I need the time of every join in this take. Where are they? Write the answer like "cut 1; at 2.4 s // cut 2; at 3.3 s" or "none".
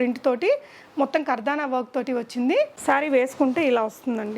cut 1; at 2.8 s